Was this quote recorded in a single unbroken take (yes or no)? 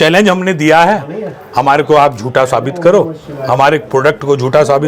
yes